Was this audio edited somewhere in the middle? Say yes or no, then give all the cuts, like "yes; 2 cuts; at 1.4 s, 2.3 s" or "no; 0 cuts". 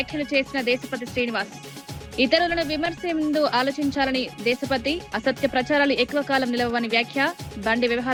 no; 0 cuts